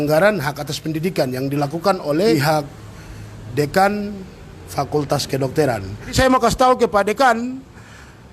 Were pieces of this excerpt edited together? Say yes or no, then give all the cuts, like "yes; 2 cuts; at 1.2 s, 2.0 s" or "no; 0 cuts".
yes; 2 cuts; at 2.3 s, 6.1 s